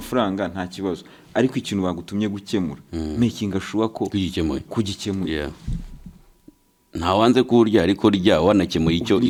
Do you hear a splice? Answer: no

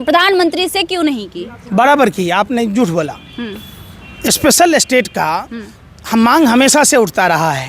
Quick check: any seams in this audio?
no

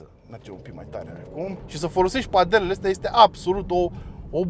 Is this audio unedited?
no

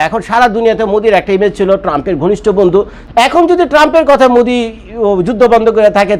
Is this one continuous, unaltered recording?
no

